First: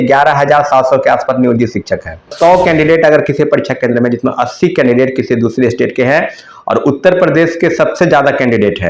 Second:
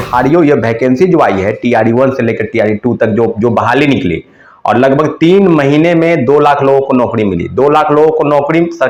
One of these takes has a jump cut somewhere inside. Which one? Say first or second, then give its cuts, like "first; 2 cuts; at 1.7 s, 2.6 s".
first; 1 cut; at 2.3 s